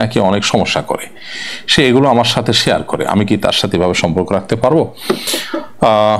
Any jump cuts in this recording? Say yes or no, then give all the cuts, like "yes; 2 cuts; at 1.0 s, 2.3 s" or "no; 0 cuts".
no; 0 cuts